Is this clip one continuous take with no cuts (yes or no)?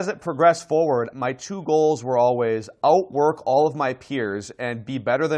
yes